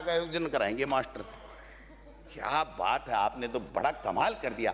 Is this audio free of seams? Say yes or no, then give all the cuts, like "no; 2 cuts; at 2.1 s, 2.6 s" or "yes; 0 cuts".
yes; 0 cuts